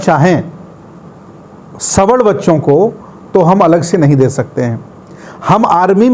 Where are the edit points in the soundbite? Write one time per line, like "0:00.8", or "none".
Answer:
none